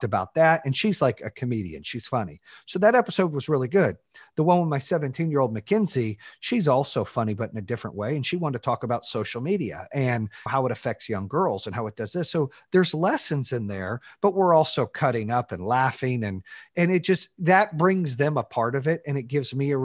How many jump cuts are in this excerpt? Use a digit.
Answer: 0